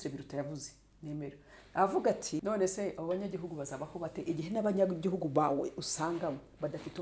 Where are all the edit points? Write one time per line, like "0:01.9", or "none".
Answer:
0:02.4